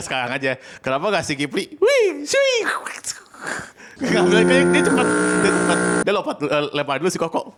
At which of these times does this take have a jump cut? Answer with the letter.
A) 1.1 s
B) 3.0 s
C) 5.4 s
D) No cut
D